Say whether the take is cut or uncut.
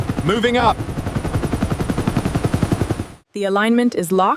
cut